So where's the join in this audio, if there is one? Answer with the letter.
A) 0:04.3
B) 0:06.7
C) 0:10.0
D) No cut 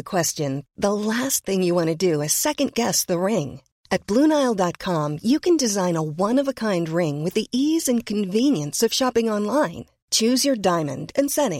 D